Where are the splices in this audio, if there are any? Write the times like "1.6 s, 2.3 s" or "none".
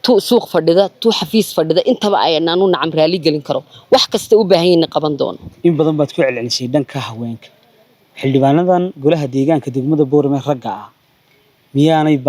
5.4 s